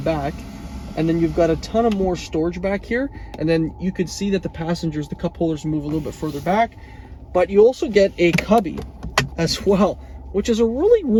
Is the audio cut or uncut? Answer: uncut